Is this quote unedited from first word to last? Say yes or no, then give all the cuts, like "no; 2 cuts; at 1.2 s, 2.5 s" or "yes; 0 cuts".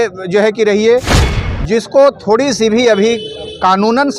no; 1 cut; at 1.2 s